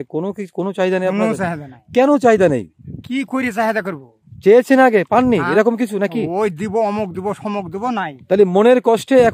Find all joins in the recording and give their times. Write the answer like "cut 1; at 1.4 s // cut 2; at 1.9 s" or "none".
none